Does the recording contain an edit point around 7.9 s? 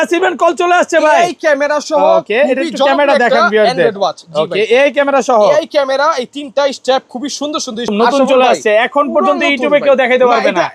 yes; 1 cut; at 7.9 s

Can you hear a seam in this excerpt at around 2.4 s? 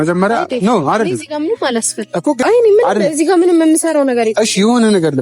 yes; 1 cut; at 2.4 s

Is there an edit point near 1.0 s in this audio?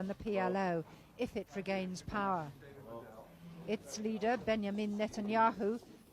no; 0 cuts

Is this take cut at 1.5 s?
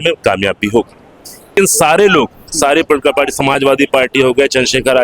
yes; 1 cut; at 1.5 s

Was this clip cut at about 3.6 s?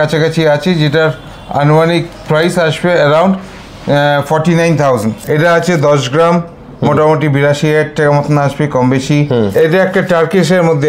no; 2 cuts; at 5.1 s, 9.5 s

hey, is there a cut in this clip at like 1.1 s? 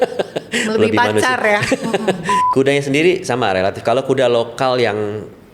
no; 1 cut; at 2.3 s

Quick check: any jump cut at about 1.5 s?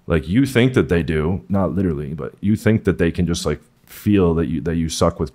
yes; 1 cut; at 1.5 s

